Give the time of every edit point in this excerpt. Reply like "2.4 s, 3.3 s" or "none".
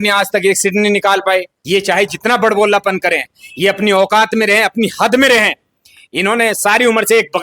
1.5 s